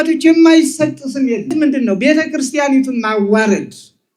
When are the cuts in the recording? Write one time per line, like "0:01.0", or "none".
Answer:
0:01.5